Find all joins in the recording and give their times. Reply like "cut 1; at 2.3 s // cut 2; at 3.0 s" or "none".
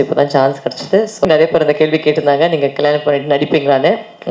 cut 1; at 1.3 s